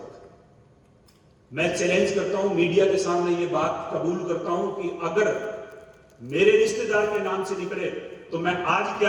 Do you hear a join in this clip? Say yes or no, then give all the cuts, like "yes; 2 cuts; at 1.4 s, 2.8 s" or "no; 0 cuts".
no; 0 cuts